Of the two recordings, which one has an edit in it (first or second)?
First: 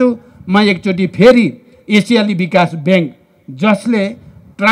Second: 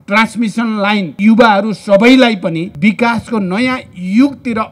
second